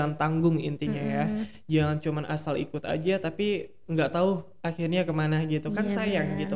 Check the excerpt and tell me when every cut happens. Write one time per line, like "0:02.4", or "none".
none